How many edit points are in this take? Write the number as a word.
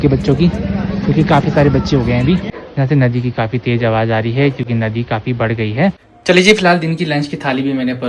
two